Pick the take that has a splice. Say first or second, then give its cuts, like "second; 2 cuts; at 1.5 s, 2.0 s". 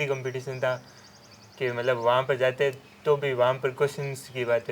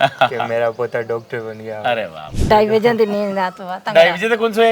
second; 1 cut; at 2.4 s